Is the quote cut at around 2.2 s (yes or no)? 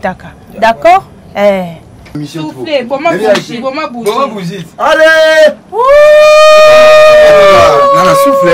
yes